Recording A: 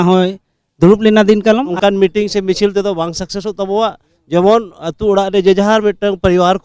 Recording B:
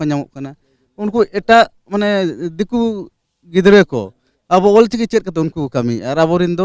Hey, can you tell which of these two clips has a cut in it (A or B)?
A